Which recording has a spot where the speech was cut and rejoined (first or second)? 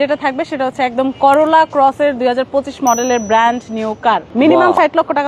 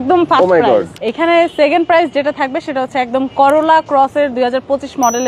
second